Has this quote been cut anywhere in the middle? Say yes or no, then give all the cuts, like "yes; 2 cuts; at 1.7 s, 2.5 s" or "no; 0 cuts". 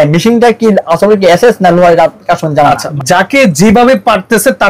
yes; 1 cut; at 2.9 s